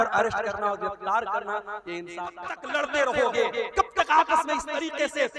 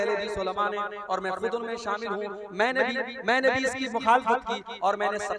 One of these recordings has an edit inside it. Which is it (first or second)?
first